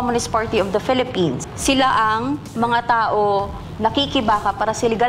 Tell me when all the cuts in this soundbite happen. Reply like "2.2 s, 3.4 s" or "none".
1.5 s, 3.6 s